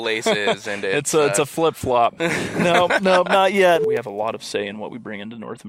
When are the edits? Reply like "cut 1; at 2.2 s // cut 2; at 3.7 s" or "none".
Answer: cut 1; at 3.8 s